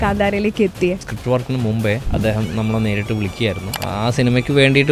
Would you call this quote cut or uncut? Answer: cut